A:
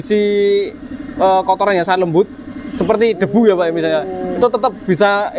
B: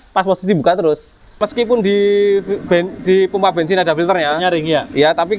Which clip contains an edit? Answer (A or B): B